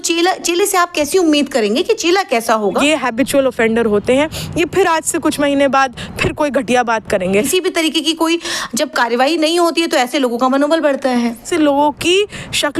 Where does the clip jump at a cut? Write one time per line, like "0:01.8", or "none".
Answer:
0:02.7
0:07.5
0:11.5